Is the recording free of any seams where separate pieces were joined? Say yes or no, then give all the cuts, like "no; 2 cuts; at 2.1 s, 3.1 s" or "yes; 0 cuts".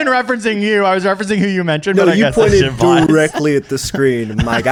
yes; 0 cuts